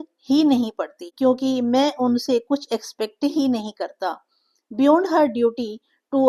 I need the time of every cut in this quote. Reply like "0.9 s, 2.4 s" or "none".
1.1 s

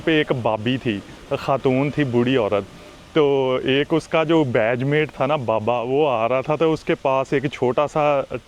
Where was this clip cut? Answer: 1.1 s

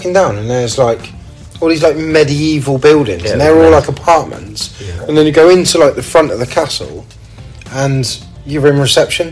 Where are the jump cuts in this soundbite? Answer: none

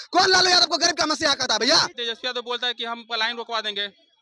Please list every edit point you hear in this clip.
2.0 s

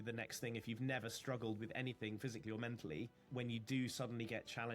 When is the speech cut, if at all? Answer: 3.2 s

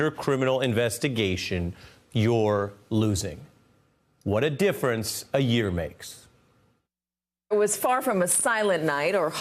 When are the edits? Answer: none

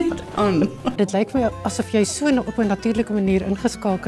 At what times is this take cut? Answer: 1.0 s

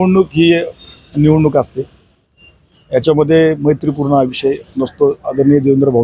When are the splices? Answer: none

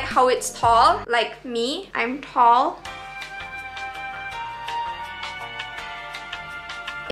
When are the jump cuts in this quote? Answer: none

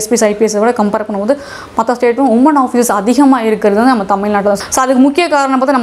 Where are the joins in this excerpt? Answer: 4.6 s

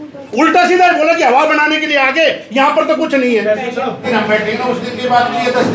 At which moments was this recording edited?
4.0 s

